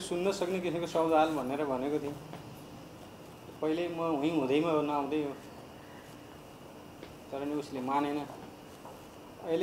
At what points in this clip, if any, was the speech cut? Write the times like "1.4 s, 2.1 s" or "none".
none